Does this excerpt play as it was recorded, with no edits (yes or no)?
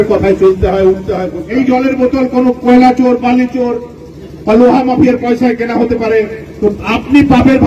no